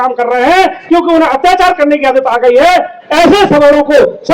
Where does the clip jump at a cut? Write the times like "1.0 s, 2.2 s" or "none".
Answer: none